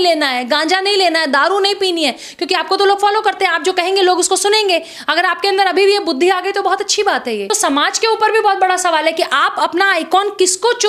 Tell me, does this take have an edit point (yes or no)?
yes